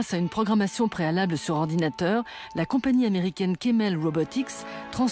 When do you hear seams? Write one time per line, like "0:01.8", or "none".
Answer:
0:03.1